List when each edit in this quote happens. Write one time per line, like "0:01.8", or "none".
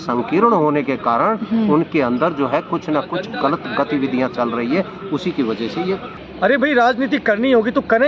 0:06.2